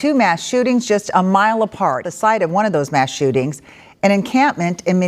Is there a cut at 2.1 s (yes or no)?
yes